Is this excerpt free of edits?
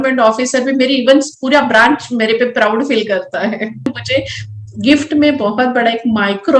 no; 1 cut; at 4.0 s

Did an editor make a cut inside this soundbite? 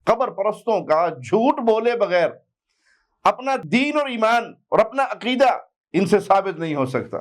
yes; 1 cut; at 3.6 s

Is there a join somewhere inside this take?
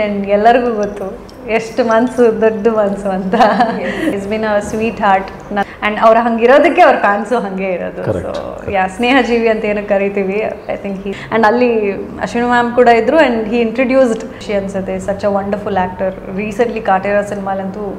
yes; 4 cuts; at 4.2 s, 5.6 s, 11.1 s, 14.3 s

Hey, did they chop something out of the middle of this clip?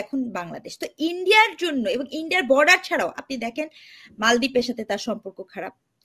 no; 0 cuts

